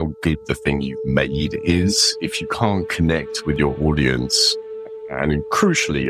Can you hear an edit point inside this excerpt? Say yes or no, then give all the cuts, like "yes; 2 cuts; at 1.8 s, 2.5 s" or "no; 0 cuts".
no; 0 cuts